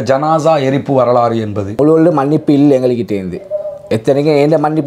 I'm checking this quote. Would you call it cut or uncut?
cut